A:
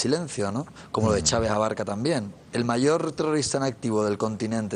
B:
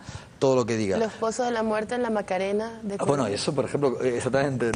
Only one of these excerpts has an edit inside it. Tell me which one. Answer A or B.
A